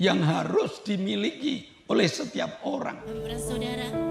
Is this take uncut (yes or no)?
no